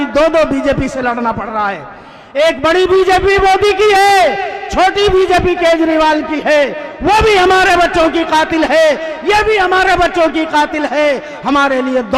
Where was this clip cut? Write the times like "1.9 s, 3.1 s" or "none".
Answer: none